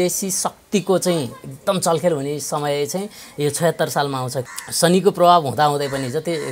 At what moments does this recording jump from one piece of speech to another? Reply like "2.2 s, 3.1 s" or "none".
4.4 s